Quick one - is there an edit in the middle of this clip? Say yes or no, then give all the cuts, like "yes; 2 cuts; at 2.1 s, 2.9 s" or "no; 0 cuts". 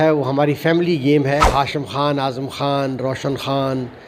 yes; 1 cut; at 1.5 s